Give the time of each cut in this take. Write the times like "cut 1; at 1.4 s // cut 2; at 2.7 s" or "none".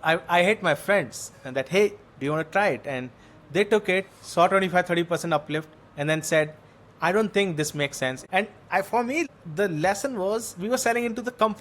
cut 1; at 8.2 s // cut 2; at 9.2 s